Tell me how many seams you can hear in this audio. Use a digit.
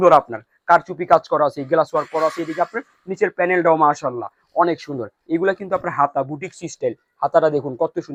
0